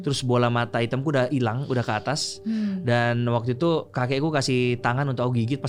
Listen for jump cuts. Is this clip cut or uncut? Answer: uncut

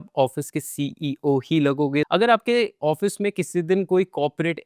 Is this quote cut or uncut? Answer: cut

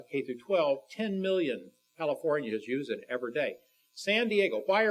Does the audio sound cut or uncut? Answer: cut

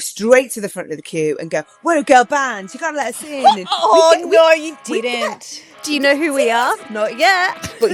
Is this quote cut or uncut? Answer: uncut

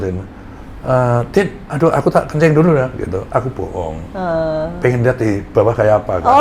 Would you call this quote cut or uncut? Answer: uncut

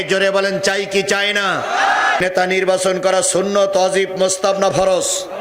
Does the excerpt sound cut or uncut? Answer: cut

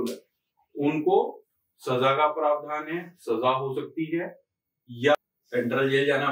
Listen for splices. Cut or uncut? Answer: cut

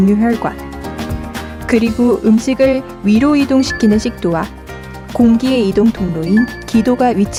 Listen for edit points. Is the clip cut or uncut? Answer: uncut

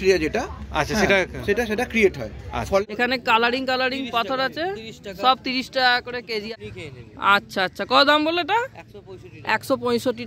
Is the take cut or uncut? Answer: cut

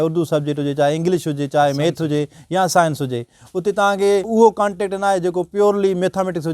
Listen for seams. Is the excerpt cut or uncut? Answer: cut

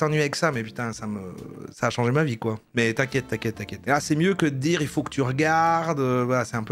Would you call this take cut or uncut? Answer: uncut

